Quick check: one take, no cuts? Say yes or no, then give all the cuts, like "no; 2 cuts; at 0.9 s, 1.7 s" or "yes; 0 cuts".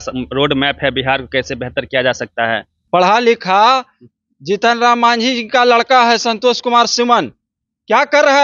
yes; 0 cuts